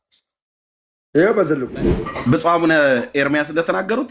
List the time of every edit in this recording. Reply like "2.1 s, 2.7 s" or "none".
1.7 s